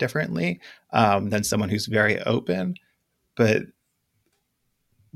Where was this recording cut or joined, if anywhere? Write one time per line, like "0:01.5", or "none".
none